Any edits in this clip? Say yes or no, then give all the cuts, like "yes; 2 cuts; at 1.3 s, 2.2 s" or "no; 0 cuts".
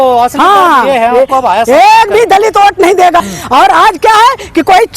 yes; 1 cut; at 3.2 s